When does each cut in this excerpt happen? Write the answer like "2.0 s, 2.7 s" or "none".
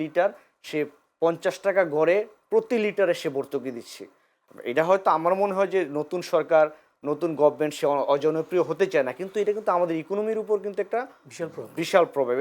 none